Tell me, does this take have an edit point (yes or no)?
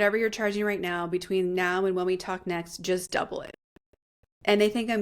no